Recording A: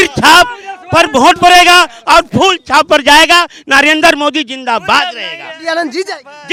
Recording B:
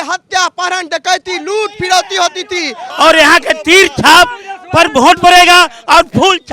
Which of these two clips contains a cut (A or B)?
B